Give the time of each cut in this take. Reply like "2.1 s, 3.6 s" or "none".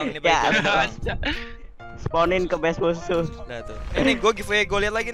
3.8 s